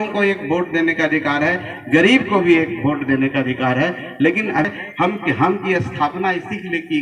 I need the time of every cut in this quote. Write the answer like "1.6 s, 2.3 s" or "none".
4.7 s